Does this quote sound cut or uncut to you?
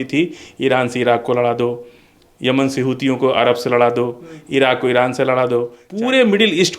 cut